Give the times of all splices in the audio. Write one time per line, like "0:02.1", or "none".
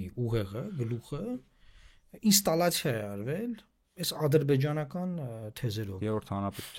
0:05.9